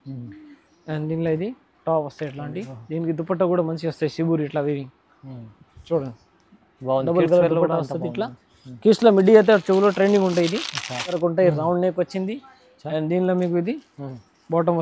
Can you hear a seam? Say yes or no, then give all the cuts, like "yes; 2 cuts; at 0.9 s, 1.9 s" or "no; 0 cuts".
yes; 1 cut; at 11.2 s